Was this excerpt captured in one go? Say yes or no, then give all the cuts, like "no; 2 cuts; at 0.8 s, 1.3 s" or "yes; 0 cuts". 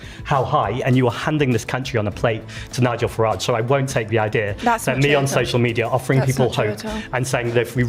yes; 0 cuts